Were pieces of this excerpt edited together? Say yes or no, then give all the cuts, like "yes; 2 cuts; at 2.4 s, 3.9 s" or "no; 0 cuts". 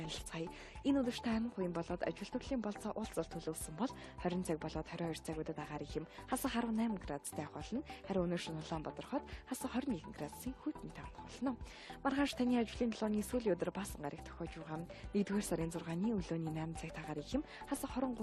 yes; 1 cut; at 15.3 s